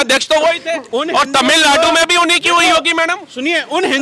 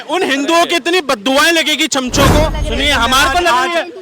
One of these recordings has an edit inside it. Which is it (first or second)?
second